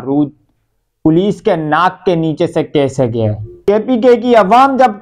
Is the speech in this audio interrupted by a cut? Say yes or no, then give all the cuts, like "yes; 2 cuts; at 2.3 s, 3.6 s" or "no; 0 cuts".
yes; 1 cut; at 3.8 s